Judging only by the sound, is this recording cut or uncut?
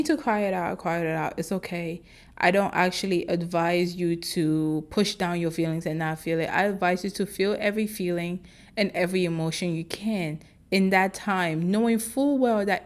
uncut